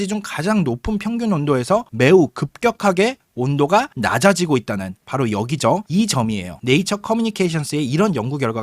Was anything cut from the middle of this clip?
yes; 1 cut; at 6.5 s

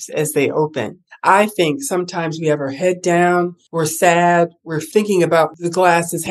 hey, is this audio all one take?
no; 2 cuts; at 3.6 s, 5.5 s

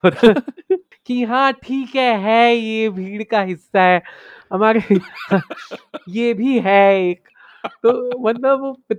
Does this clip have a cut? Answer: yes; 1 cut; at 0.9 s

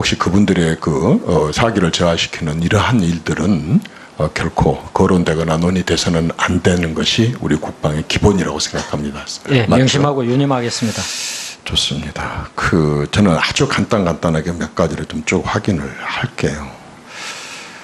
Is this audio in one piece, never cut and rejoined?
no; 1 cut; at 7.5 s

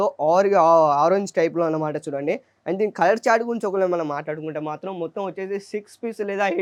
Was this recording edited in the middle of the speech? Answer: no; 0 cuts

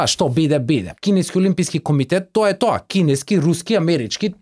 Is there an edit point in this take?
yes; 1 cut; at 0.9 s

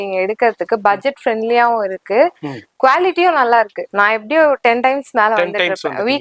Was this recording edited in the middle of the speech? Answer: yes; 1 cut; at 3.8 s

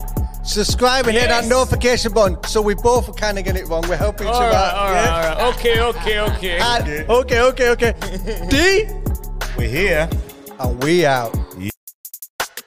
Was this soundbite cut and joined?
yes; 1 cut; at 11.7 s

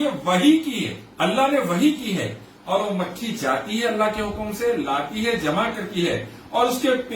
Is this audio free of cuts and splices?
no; 1 cut; at 1.0 s

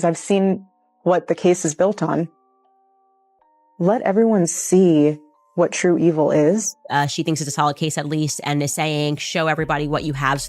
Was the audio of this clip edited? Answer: yes; 1 cut; at 6.8 s

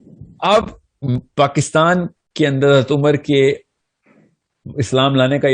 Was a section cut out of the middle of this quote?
yes; 1 cut; at 1.2 s

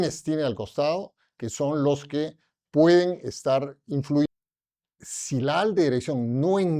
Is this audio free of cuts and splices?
no; 1 cut; at 4.3 s

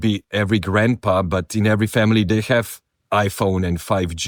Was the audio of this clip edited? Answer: no; 0 cuts

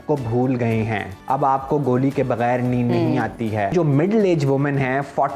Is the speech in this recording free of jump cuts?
no; 2 cuts; at 1.1 s, 3.7 s

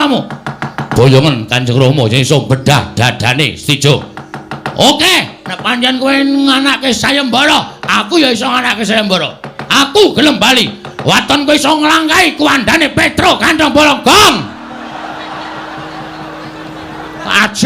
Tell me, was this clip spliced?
yes; 1 cut; at 14.4 s

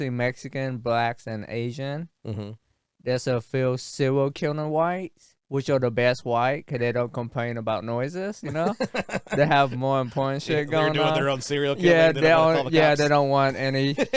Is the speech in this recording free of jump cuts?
yes; 0 cuts

